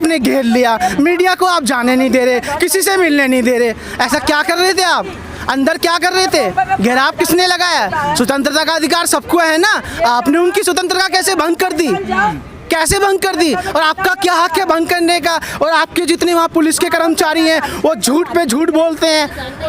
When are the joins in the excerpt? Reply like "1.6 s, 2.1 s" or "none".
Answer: none